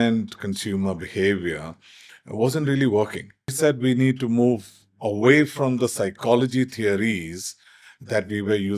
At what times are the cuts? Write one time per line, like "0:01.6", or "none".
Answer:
0:03.5